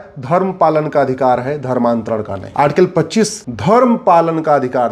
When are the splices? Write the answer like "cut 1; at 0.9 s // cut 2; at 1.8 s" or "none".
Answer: cut 1; at 2.4 s // cut 2; at 3.5 s

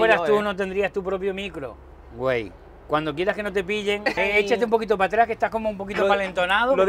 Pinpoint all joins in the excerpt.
cut 1; at 4.1 s

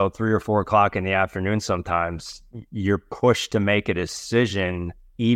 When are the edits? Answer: none

